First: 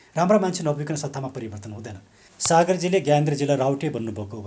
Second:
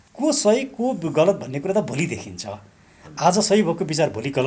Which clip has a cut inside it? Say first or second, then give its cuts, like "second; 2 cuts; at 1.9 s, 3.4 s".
first; 1 cut; at 2.3 s